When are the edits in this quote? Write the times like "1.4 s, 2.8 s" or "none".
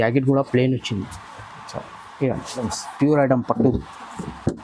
2.8 s